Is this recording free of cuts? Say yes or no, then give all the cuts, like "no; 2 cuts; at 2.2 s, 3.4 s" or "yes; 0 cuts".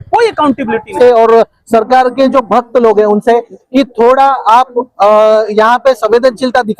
no; 1 cut; at 0.9 s